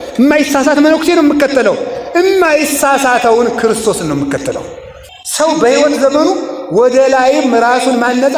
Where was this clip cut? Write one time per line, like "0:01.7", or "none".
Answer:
0:05.1